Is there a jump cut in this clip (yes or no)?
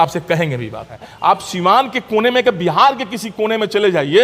yes